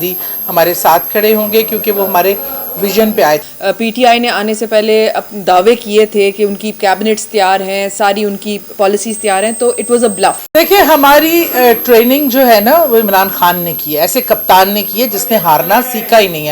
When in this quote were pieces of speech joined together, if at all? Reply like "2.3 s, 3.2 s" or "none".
3.4 s, 10.4 s